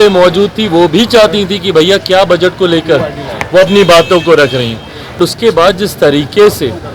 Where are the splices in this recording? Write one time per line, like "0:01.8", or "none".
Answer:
0:05.2

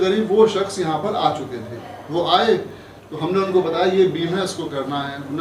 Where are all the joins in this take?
none

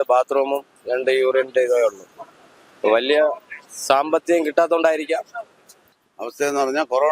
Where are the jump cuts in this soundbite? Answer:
0:05.8

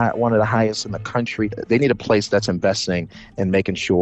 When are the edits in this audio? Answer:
0:01.6

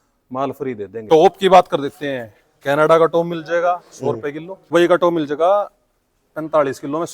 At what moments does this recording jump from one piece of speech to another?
0:00.9
0:04.7

